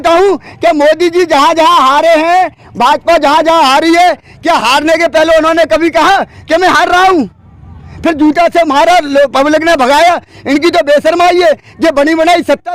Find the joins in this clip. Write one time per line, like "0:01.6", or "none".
none